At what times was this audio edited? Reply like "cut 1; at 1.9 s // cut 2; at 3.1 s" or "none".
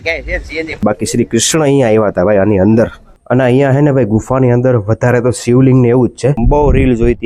cut 1; at 0.8 s // cut 2; at 3.1 s // cut 3; at 6.4 s

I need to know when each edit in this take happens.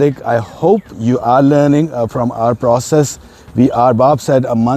cut 1; at 0.9 s

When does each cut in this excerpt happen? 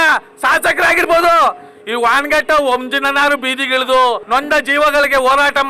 cut 1; at 4.2 s

